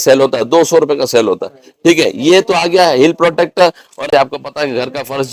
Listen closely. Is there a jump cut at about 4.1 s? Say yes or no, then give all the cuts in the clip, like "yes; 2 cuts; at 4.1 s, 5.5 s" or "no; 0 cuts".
yes; 1 cut; at 4.1 s